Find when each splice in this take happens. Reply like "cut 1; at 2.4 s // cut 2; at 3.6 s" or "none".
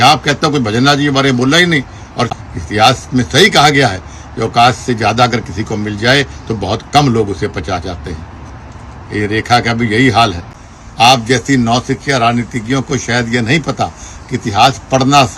cut 1; at 2.3 s // cut 2; at 10.4 s